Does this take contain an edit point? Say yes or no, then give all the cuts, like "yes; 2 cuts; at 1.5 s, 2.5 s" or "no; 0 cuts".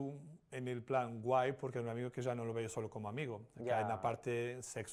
no; 0 cuts